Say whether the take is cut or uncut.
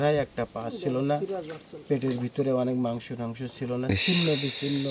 uncut